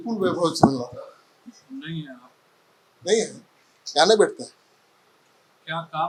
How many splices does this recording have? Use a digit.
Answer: 0